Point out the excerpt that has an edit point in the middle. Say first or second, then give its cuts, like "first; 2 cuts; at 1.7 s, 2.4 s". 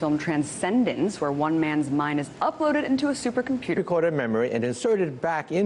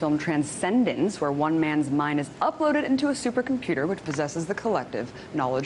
second; 1 cut; at 3.8 s